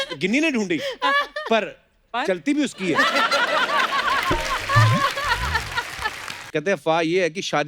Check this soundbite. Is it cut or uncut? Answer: cut